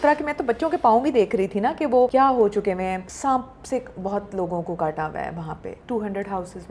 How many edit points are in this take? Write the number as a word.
three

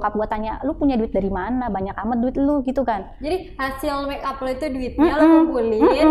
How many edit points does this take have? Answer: zero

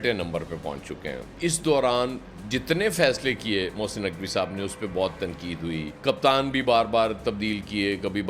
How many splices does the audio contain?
one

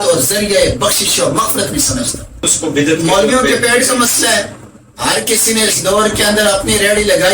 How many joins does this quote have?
one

